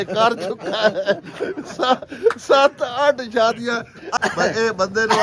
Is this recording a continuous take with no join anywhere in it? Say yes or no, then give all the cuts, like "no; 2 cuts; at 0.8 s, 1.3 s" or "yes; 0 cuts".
no; 1 cut; at 4.1 s